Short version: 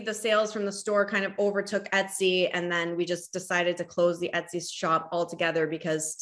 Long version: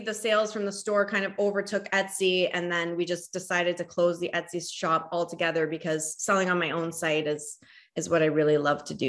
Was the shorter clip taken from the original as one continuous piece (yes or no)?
yes